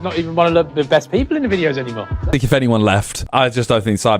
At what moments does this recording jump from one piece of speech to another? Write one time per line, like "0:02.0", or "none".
0:02.3
0:03.2